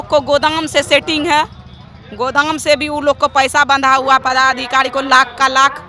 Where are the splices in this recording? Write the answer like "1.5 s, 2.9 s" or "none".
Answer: none